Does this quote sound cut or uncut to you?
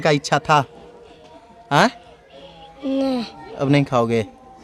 uncut